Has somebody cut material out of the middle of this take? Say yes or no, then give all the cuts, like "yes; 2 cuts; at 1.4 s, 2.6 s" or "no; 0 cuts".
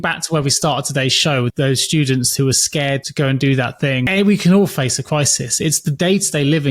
yes; 3 cuts; at 1.5 s, 3.1 s, 4.1 s